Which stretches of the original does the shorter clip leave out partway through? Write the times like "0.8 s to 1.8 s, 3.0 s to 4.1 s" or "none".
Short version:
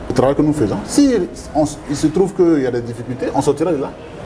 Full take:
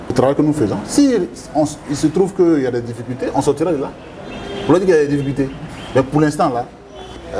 none